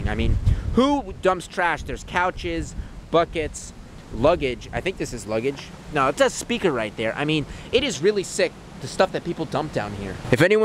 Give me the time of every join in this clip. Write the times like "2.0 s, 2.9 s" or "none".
none